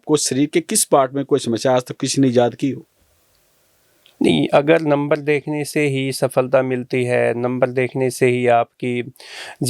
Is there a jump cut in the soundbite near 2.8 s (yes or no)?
no